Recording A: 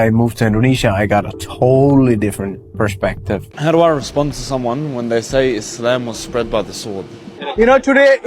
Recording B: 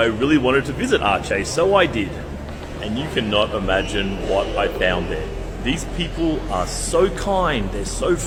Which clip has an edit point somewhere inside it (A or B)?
A